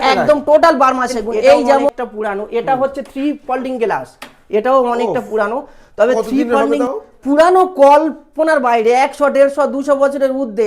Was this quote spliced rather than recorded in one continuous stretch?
yes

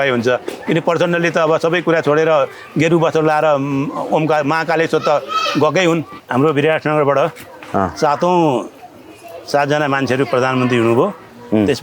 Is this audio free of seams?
no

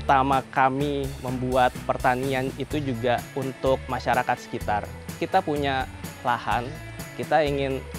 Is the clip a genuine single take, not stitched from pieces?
no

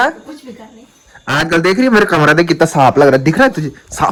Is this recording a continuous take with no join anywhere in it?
yes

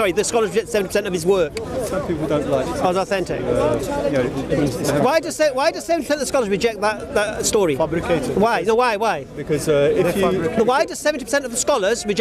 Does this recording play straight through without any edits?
yes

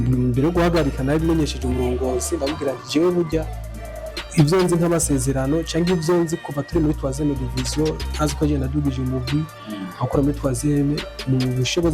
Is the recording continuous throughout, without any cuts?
yes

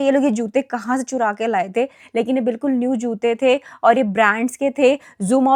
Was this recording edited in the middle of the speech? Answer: no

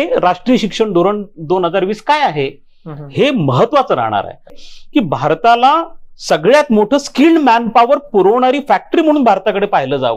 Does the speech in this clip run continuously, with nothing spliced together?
no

